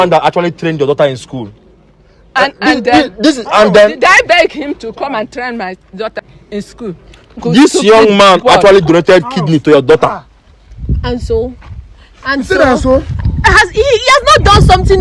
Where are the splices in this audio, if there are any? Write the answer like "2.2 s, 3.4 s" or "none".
6.2 s, 7.4 s